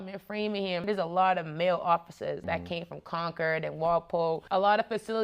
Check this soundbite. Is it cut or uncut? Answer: cut